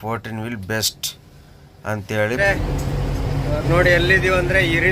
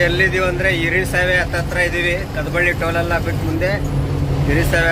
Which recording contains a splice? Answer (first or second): first